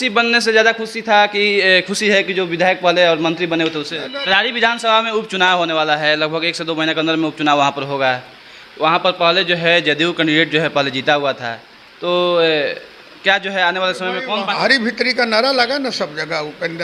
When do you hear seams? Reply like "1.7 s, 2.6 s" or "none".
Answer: 4.0 s, 14.5 s